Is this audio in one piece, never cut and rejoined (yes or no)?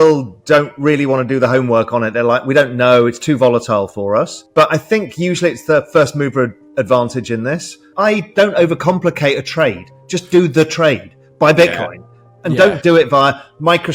no